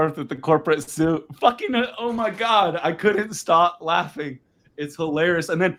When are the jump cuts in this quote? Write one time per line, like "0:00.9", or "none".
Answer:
none